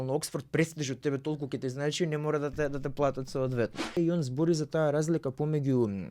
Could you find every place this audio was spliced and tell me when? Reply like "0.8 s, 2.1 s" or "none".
4.0 s